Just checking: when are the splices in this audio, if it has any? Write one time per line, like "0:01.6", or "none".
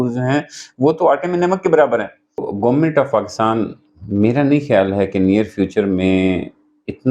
0:02.5